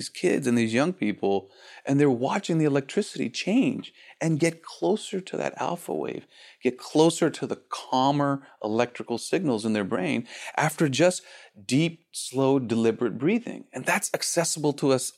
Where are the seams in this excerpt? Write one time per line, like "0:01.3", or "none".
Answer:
none